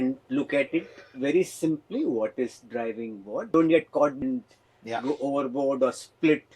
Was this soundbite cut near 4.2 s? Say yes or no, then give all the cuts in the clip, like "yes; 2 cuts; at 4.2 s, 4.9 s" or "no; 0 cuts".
yes; 2 cuts; at 3.5 s, 4.2 s